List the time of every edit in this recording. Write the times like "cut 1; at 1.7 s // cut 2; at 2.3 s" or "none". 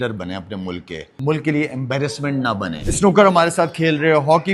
cut 1; at 1.0 s // cut 2; at 2.8 s